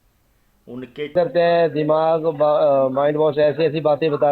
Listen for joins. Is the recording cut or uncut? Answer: cut